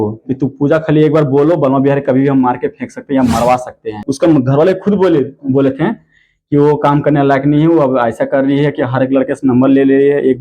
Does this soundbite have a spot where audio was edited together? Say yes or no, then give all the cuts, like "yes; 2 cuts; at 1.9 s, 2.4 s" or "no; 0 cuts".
yes; 1 cut; at 4.0 s